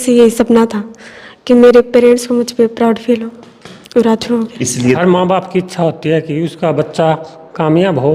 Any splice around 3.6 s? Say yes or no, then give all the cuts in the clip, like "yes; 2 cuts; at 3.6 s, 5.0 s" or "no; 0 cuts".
no; 1 cut; at 5.0 s